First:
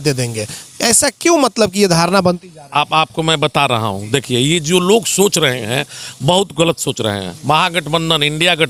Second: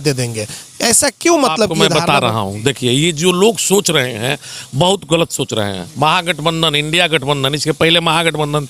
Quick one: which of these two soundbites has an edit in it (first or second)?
second